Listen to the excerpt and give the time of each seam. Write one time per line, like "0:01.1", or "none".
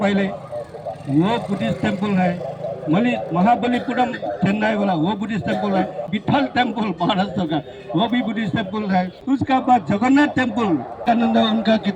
0:06.1
0:09.2
0:11.0